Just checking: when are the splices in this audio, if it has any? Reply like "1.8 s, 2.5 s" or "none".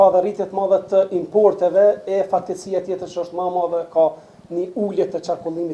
none